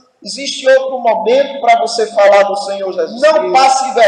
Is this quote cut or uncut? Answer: cut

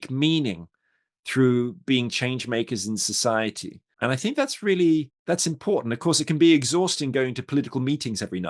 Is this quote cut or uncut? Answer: cut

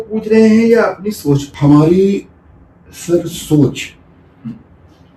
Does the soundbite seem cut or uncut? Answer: uncut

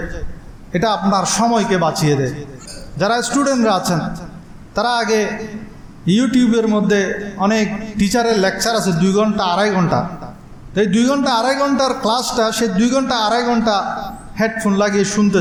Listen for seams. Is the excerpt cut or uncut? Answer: uncut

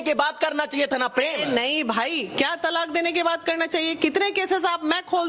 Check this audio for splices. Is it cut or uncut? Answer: uncut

